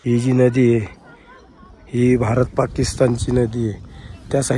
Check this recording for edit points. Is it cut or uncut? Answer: uncut